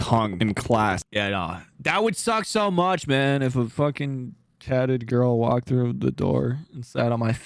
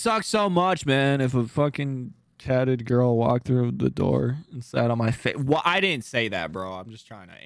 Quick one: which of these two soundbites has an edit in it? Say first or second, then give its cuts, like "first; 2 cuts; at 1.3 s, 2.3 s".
first; 1 cut; at 1.0 s